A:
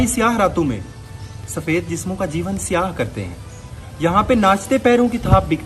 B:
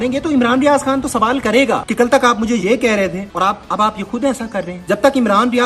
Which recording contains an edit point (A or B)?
B